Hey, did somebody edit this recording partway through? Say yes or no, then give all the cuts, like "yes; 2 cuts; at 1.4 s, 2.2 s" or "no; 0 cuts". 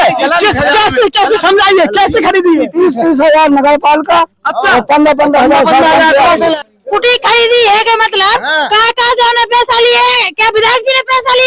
yes; 1 cut; at 6.6 s